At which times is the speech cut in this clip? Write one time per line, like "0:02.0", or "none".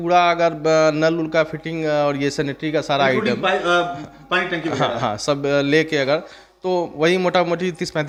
none

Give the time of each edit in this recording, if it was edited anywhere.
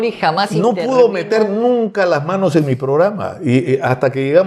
none

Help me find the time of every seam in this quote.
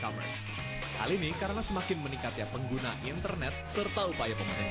none

